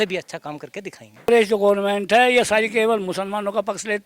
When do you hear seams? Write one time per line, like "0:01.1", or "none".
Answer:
0:01.3